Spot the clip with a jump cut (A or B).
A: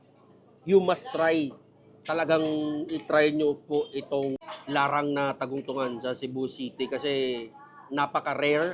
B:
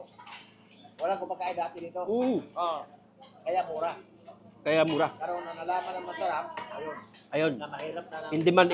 A